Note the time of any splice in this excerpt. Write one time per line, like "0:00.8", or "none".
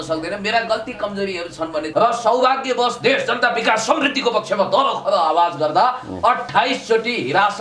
0:01.9